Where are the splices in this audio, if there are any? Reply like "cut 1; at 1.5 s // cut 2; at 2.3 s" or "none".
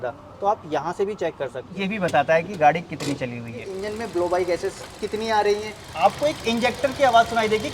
cut 1; at 1.6 s // cut 2; at 3.7 s // cut 3; at 5.9 s